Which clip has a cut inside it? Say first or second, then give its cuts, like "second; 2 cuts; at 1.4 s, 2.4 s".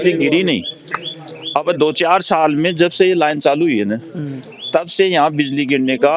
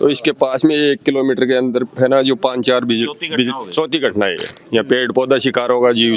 second; 1 cut; at 4.5 s